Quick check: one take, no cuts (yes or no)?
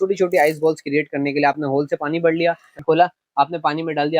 no